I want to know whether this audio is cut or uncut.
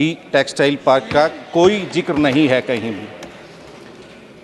uncut